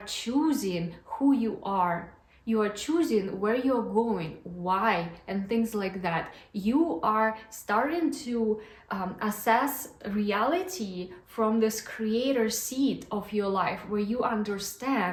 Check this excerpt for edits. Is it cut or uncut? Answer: uncut